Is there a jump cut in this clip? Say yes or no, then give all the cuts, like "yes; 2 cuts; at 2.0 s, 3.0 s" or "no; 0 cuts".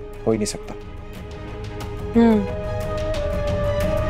no; 0 cuts